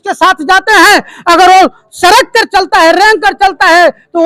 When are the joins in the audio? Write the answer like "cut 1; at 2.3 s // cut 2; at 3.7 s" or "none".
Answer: none